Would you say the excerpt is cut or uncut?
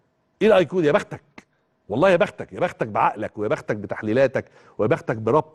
uncut